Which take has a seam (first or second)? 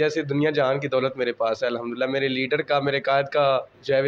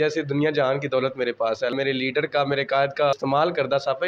second